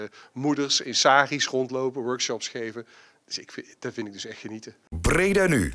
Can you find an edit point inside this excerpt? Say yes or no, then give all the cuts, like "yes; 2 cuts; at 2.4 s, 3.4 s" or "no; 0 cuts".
yes; 1 cut; at 4.7 s